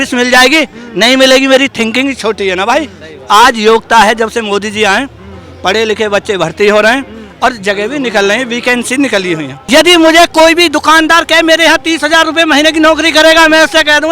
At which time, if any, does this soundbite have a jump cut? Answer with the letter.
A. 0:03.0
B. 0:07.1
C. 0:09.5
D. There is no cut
C